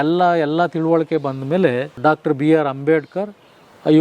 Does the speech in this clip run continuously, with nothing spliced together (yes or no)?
no